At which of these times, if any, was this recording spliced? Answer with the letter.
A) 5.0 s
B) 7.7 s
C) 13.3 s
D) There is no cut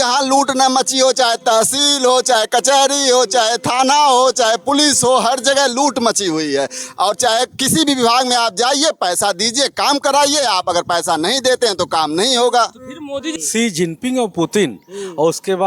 C